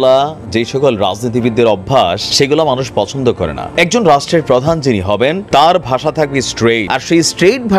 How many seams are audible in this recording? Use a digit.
4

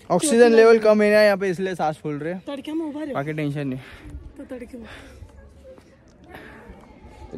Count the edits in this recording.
0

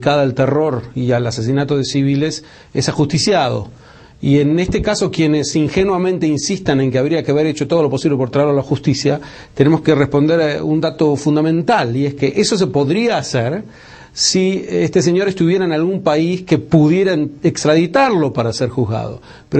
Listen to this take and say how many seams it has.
1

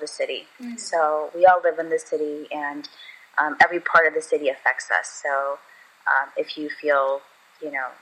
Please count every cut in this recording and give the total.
0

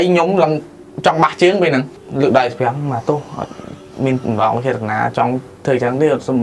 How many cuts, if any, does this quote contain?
1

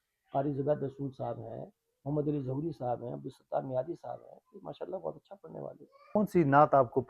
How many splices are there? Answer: 1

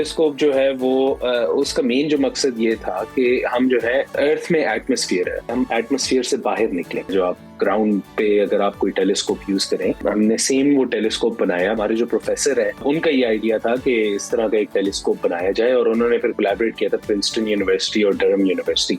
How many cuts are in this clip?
6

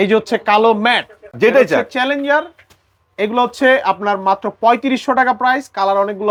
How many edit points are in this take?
0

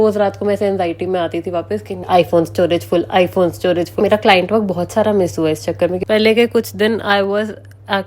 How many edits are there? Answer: 3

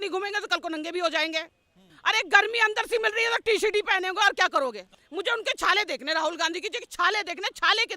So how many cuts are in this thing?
2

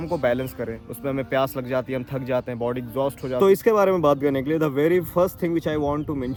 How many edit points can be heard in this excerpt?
0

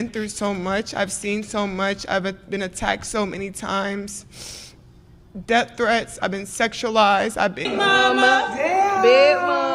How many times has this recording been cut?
1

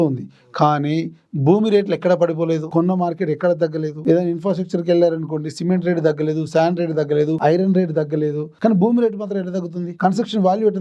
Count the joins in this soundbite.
5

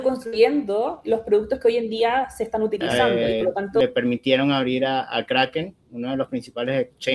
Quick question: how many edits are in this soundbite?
1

